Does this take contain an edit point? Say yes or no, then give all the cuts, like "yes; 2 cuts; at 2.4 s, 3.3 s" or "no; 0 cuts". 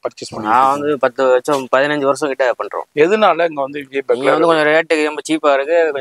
yes; 1 cut; at 2.8 s